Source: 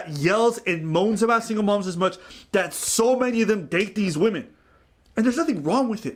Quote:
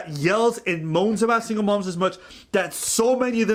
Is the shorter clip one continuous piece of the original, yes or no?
yes